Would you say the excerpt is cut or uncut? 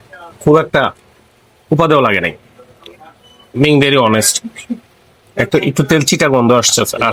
uncut